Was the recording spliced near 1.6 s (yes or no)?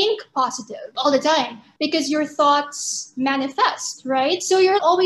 yes